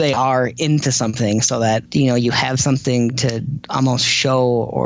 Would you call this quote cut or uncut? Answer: cut